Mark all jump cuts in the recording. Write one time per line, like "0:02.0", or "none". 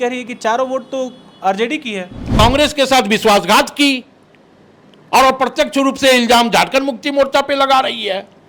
0:02.4